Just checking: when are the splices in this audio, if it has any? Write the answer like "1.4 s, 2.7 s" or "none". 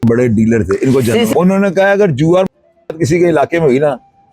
1.3 s